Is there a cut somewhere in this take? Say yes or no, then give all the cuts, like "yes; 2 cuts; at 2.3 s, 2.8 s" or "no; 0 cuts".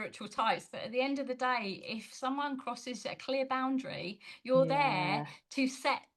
no; 0 cuts